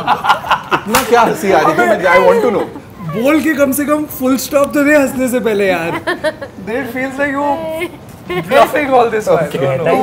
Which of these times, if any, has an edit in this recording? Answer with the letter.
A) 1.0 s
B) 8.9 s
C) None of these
C